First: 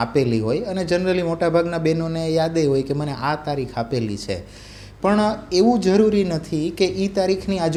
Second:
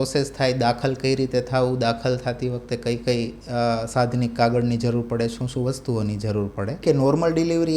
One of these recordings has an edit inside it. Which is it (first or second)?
second